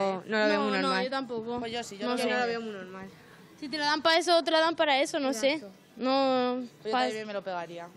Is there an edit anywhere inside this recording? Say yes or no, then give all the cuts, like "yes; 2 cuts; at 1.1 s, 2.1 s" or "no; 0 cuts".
no; 0 cuts